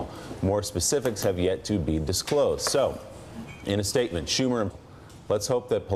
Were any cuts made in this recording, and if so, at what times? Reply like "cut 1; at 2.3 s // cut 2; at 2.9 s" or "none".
none